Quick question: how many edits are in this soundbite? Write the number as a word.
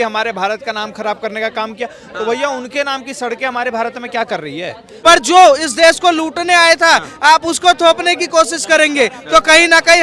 one